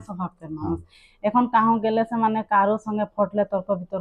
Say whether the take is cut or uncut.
uncut